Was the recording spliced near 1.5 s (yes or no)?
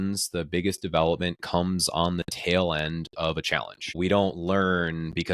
no